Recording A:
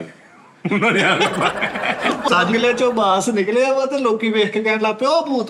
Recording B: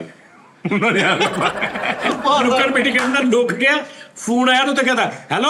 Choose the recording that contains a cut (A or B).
A